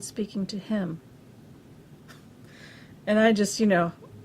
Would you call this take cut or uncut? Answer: cut